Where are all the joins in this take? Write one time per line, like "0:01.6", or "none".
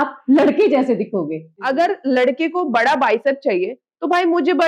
0:01.6